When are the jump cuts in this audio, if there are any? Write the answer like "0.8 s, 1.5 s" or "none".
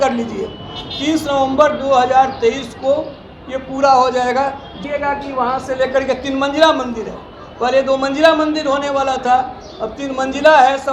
4.8 s

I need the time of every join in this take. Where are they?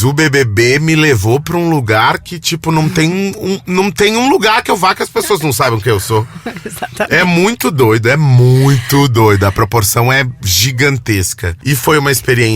11.5 s

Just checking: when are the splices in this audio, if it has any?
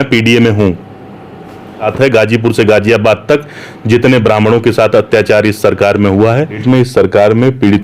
1.9 s, 6.6 s

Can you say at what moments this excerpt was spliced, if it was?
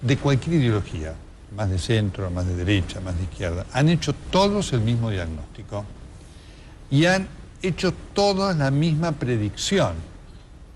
8.3 s

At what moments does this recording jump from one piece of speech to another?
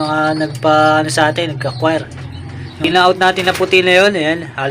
2.8 s

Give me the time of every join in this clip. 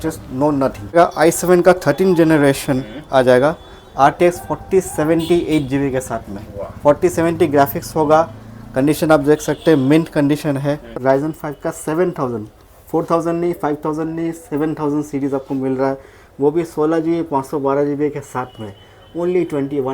0.9 s, 10.9 s

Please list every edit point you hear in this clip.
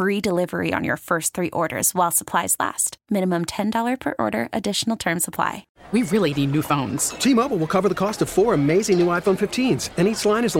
5.7 s

